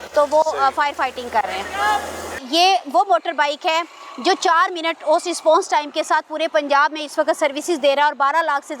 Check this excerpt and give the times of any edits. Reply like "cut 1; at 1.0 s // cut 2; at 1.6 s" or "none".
cut 1; at 2.4 s